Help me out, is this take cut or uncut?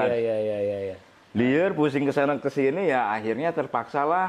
uncut